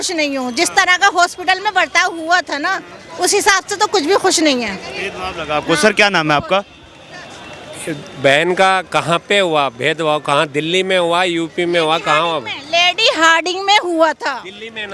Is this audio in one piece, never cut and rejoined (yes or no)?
yes